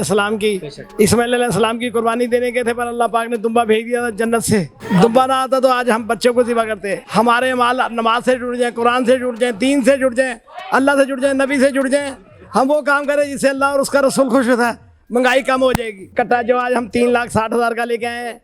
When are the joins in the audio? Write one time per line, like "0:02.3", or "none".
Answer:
0:04.8
0:06.9
0:16.0